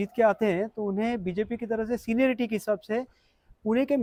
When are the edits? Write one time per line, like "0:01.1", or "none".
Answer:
none